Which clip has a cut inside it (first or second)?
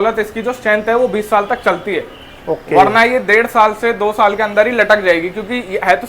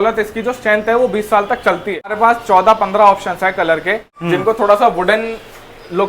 second